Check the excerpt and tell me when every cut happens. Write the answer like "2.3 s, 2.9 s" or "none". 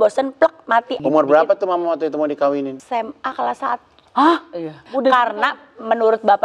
1.0 s, 2.8 s, 4.9 s